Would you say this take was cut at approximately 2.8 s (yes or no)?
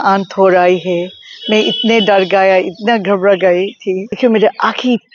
no